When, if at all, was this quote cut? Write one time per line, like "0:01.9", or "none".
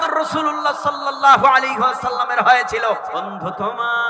0:03.2